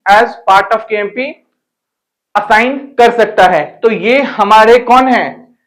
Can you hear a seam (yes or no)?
no